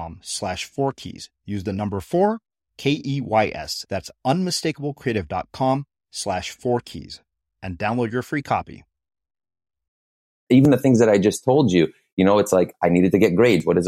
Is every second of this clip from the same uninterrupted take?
no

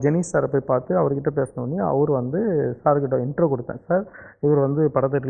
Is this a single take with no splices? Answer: yes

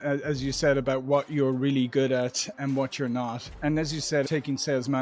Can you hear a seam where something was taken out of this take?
no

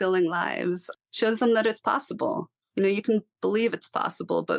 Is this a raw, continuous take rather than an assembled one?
yes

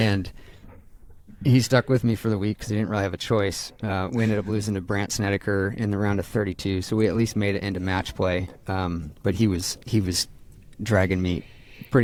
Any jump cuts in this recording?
no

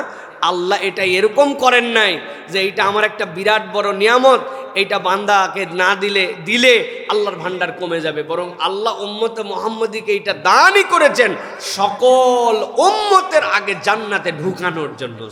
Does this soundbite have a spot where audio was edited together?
no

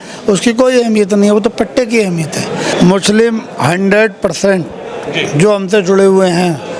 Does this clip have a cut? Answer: yes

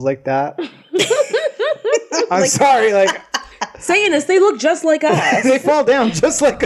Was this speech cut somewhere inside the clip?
no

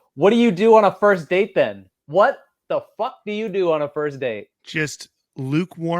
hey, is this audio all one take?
no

